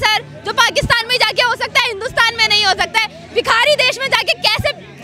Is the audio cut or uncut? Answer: uncut